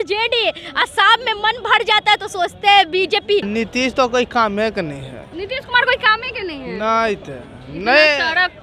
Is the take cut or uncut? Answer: cut